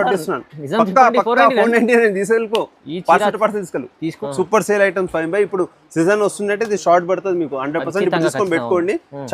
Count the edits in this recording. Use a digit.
1